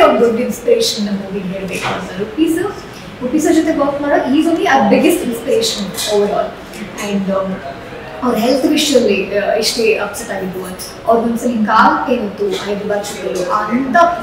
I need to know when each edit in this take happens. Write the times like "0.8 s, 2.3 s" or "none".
none